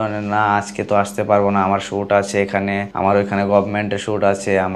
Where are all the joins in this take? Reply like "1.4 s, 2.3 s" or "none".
2.9 s